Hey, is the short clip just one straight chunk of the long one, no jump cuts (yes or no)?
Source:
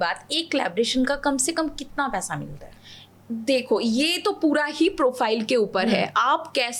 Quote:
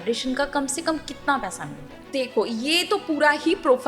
no